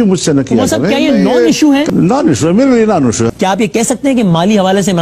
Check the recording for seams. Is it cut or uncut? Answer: cut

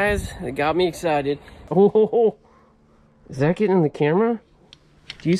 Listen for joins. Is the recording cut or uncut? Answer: cut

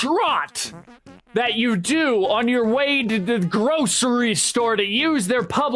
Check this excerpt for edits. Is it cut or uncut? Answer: uncut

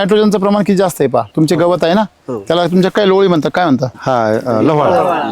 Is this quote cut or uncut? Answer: cut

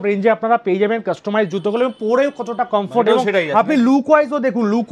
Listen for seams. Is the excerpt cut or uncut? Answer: uncut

